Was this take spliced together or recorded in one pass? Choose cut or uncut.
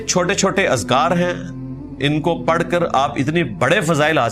uncut